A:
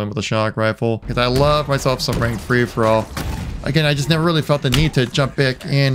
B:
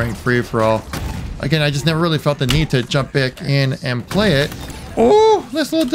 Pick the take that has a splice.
A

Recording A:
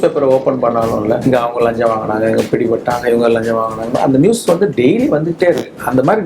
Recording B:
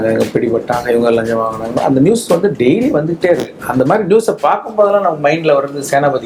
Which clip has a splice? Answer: A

